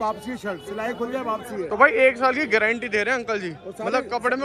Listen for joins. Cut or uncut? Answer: uncut